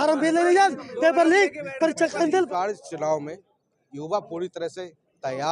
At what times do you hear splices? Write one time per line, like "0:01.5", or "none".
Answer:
0:02.5